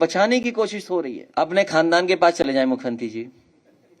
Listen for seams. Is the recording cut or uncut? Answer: cut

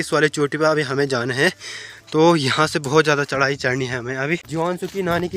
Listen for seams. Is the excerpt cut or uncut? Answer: cut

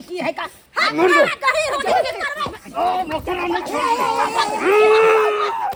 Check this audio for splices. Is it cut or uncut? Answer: uncut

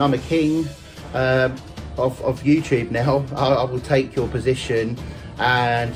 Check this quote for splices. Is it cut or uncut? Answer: uncut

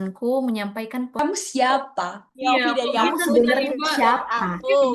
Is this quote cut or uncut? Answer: cut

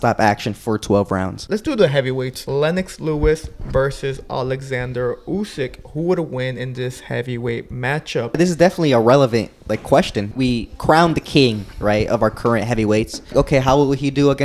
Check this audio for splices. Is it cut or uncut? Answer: cut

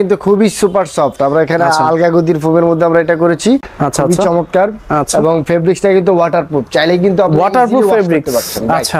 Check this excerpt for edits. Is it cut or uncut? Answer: cut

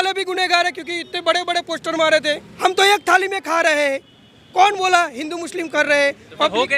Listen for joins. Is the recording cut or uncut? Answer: cut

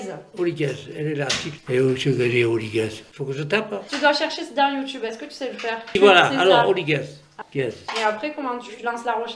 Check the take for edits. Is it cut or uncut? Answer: cut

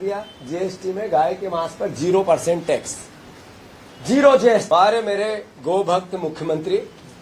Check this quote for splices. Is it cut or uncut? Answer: cut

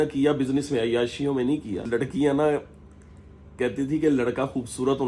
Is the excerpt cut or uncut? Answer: cut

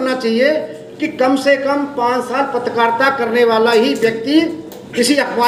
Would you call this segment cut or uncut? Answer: uncut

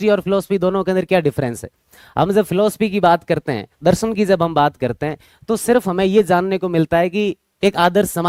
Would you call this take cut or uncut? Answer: uncut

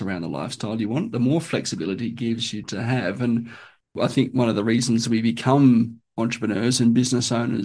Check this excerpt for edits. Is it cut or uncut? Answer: cut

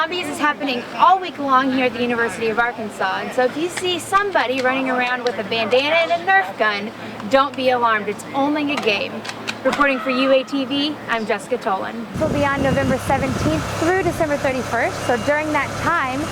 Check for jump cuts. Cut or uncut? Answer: cut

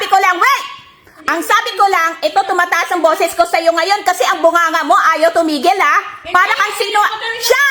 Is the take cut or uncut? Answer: uncut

